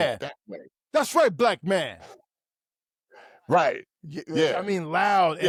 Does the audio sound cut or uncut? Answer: uncut